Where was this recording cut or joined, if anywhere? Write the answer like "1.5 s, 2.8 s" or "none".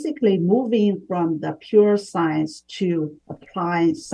none